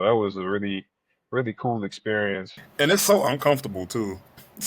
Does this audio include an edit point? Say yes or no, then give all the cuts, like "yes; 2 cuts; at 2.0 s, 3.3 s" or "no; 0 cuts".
yes; 1 cut; at 2.6 s